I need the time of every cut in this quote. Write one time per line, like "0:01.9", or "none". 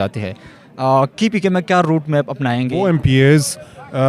0:02.7

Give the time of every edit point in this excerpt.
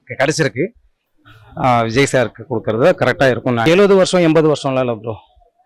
0:01.1
0:03.6

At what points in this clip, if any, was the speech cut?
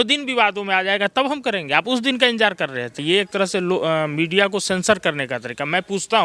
0:02.9

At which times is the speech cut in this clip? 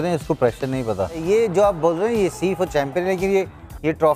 0:01.2

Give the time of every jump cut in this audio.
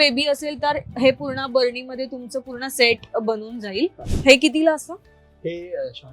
0:04.1

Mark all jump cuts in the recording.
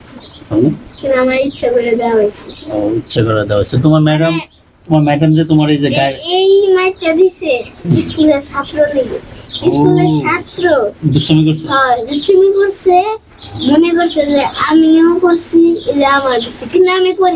none

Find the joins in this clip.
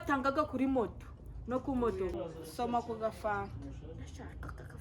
0:02.1

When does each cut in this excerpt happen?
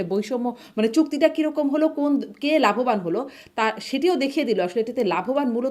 none

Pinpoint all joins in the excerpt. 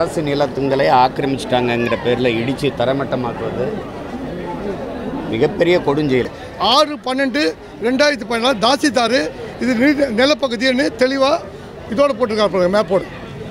0:06.4

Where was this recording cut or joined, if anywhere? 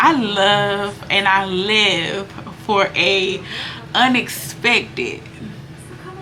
none

